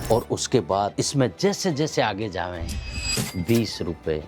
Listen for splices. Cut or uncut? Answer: cut